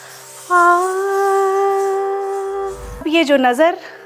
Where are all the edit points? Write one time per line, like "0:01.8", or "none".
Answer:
0:03.0

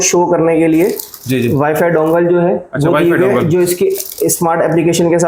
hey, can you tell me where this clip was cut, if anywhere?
none

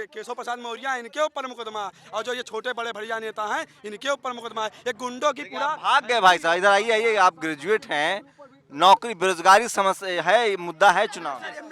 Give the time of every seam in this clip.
none

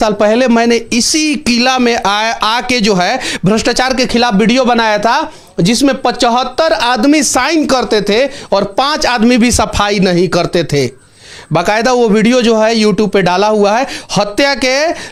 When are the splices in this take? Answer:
none

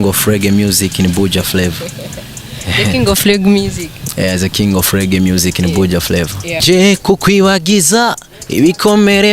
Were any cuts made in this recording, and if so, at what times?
0:06.6

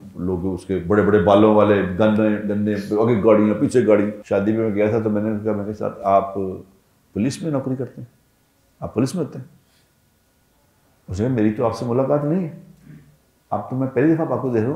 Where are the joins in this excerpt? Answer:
0:04.2

